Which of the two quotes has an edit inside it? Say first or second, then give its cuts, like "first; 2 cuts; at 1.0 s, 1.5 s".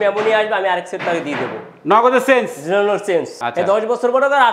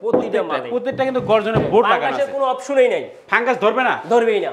first; 1 cut; at 3.4 s